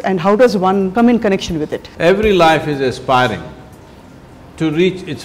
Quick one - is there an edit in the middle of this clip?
yes; 2 cuts; at 0.9 s, 1.8 s

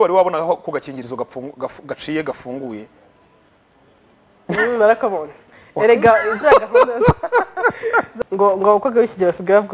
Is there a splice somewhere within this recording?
yes; 1 cut; at 8.1 s

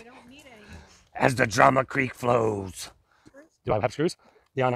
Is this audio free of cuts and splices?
no; 1 cut; at 3.4 s

